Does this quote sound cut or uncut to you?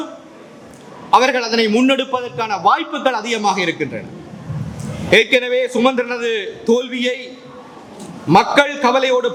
uncut